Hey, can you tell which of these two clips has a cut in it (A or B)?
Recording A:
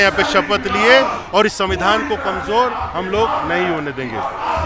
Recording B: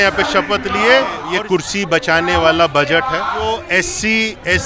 B